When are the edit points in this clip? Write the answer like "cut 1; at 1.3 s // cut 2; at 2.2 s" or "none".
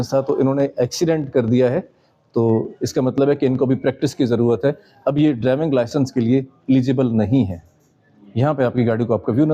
none

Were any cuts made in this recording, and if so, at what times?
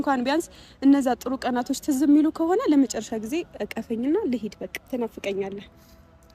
cut 1; at 4.7 s

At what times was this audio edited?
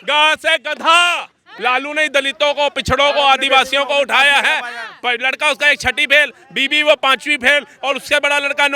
cut 1; at 1.5 s

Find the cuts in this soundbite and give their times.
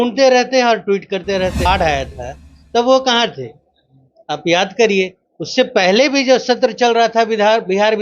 cut 1; at 1.7 s

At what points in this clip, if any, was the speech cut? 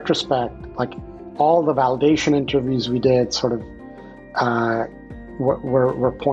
none

